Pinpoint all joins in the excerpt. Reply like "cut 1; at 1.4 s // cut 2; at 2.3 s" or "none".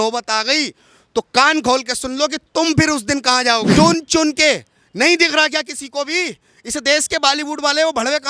cut 1; at 3.7 s